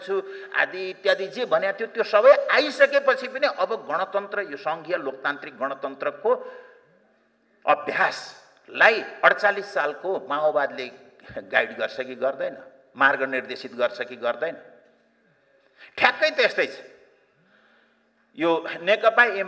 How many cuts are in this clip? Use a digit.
0